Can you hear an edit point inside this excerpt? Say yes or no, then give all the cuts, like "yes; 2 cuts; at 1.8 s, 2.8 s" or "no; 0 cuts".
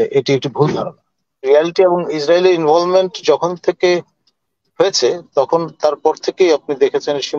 yes; 1 cut; at 1.4 s